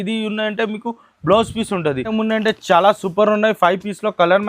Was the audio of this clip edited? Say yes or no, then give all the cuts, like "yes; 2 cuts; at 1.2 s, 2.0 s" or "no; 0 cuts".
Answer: yes; 1 cut; at 2.1 s